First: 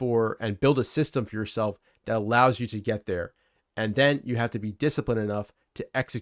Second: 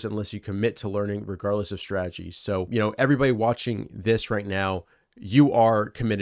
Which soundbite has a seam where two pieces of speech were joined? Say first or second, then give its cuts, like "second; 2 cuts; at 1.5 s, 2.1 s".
second; 1 cut; at 2.7 s